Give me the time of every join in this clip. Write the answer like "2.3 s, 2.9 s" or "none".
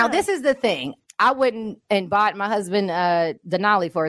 0.9 s